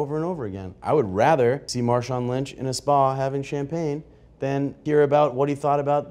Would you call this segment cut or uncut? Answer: cut